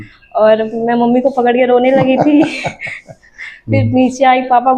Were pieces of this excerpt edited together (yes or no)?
no